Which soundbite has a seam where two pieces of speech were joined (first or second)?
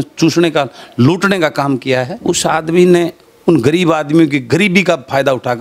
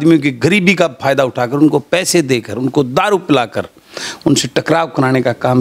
first